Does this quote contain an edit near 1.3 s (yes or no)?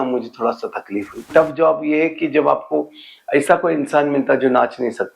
yes